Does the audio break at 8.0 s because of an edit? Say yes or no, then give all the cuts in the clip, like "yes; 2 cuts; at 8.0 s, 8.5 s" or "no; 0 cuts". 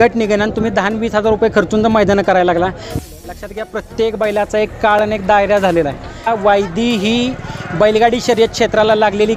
no; 2 cuts; at 3.0 s, 6.3 s